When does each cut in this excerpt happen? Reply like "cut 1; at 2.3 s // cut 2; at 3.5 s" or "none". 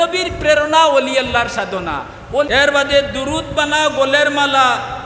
cut 1; at 2.5 s